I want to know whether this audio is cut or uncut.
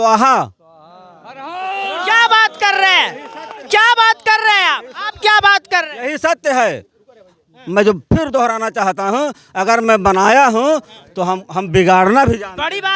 uncut